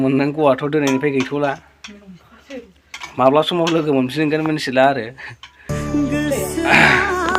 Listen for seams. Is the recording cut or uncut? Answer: uncut